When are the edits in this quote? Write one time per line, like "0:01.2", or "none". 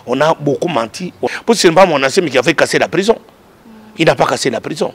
0:01.2